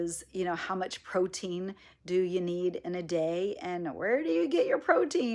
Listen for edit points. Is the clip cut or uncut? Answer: uncut